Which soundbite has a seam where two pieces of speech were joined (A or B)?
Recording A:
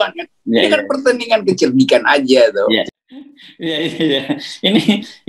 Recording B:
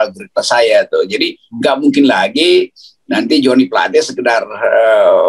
A